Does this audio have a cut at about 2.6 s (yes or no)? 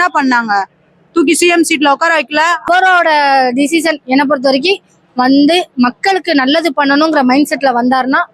yes